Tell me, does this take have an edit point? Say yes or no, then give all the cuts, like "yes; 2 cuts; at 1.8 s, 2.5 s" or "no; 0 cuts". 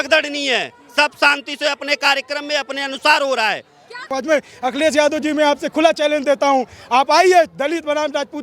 yes; 1 cut; at 4.0 s